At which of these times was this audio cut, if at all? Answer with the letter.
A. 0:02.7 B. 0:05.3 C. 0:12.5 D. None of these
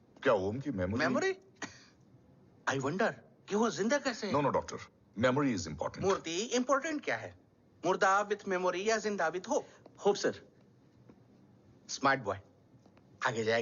D